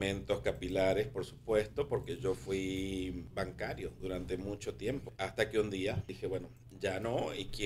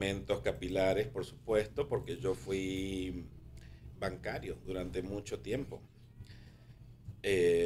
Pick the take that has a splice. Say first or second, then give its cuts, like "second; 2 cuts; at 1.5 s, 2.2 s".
first; 3 cuts; at 3.2 s, 5.1 s, 6.1 s